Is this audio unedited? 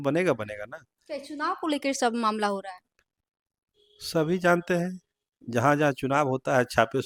yes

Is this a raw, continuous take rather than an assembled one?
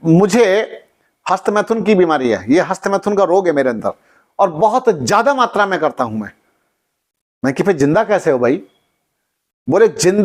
yes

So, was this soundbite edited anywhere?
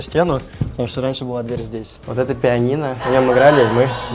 yes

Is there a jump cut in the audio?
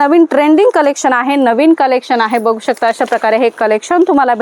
no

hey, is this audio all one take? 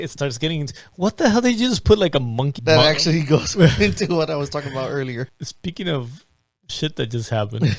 no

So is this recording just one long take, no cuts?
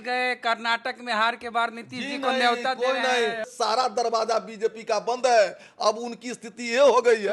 no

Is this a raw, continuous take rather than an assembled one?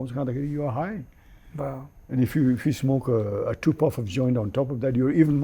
yes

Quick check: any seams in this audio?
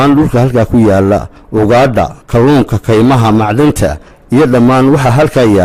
no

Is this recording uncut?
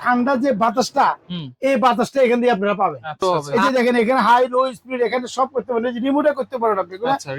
no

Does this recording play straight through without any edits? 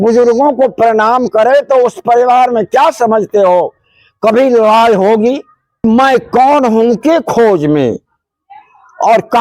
no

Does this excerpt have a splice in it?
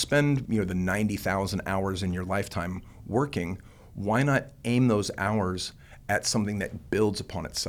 no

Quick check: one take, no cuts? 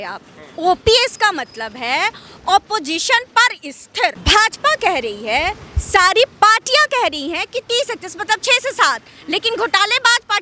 no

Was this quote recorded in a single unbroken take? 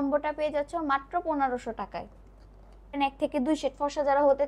no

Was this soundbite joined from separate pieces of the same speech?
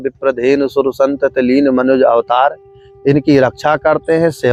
no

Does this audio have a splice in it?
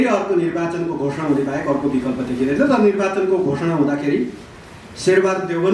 no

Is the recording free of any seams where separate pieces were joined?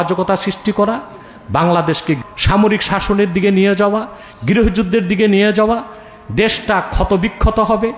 no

